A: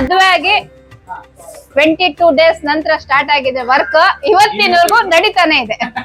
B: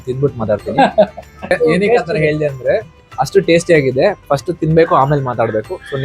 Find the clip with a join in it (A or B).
B